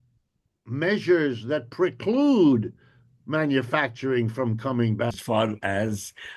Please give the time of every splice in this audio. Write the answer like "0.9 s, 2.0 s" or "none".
5.2 s